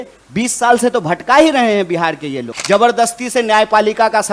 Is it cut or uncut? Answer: cut